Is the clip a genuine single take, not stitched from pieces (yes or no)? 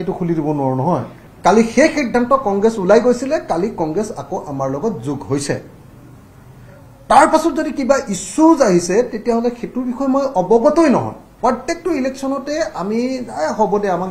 no